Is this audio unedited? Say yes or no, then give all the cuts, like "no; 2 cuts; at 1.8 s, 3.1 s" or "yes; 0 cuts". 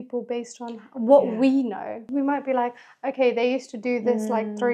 no; 1 cut; at 2.0 s